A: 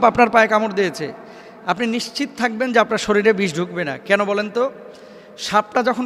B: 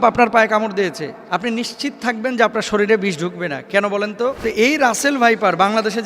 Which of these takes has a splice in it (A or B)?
B